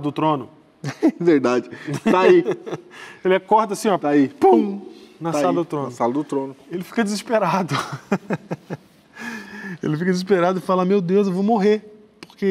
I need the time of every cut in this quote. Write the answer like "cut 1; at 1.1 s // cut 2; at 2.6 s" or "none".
none